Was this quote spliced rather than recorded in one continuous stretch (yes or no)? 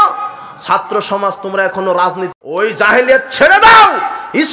no